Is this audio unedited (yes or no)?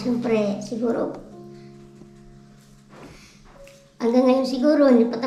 yes